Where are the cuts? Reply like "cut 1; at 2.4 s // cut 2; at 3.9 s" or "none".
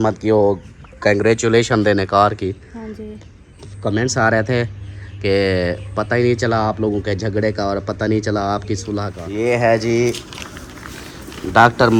cut 1; at 9.2 s